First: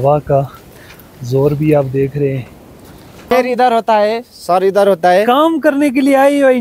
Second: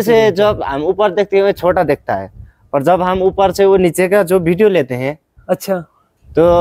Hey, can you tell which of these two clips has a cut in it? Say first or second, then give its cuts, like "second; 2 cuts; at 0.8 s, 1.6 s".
first; 1 cut; at 3.3 s